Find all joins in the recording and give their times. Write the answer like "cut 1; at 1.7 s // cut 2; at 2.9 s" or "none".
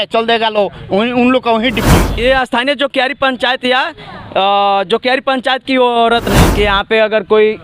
cut 1; at 2.0 s // cut 2; at 6.5 s